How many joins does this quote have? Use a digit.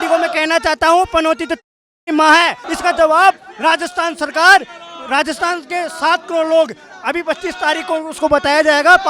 1